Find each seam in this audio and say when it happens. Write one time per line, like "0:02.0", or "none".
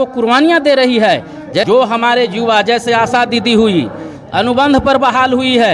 0:01.6